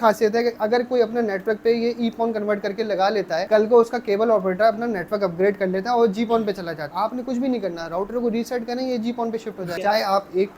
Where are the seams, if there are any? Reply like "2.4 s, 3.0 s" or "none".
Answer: 3.4 s, 6.8 s, 9.7 s